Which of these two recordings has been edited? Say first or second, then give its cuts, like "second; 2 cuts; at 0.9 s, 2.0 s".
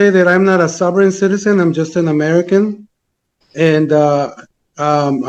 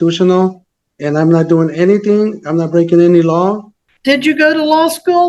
second; 1 cut; at 3.8 s